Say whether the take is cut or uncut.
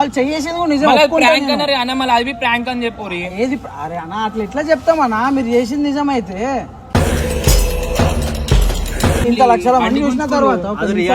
cut